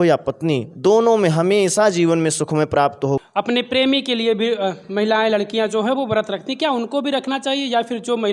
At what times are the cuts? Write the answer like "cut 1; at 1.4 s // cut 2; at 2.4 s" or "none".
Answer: cut 1; at 3.3 s